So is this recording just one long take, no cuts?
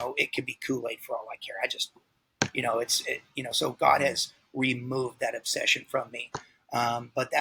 yes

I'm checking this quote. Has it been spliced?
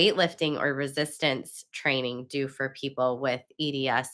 no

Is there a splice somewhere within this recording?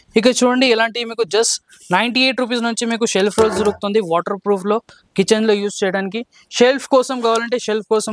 no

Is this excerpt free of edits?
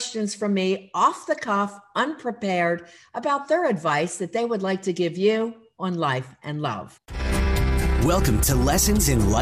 no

